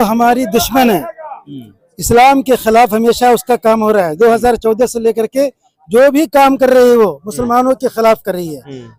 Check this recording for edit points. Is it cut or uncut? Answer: uncut